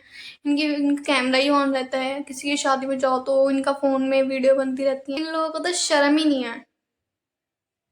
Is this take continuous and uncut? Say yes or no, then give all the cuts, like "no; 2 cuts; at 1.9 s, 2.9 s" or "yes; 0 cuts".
no; 1 cut; at 5.1 s